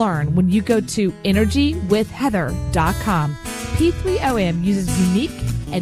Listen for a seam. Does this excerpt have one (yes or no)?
no